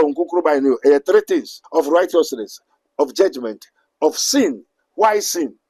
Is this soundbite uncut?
no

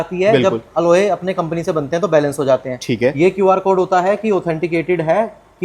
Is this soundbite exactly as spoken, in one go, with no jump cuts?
yes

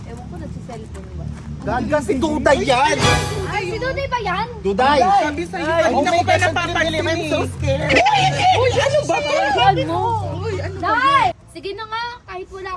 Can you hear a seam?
yes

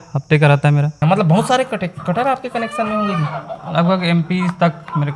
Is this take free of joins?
no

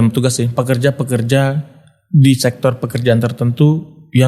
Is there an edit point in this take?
no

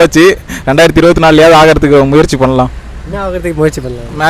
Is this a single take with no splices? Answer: yes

